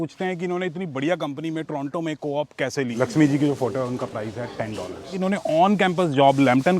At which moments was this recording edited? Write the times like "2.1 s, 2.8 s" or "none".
2.9 s, 5.1 s